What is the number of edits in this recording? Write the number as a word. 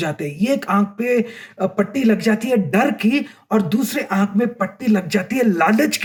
zero